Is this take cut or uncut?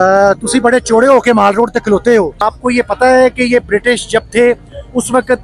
uncut